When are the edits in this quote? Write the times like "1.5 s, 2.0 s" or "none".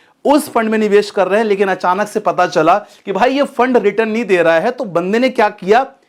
none